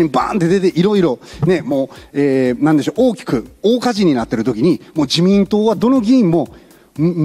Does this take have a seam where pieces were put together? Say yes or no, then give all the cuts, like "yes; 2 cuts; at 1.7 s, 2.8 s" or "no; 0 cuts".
no; 0 cuts